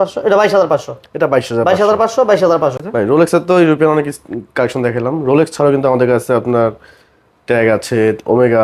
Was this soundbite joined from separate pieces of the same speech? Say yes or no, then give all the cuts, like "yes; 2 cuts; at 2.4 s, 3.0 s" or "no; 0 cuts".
yes; 1 cut; at 2.8 s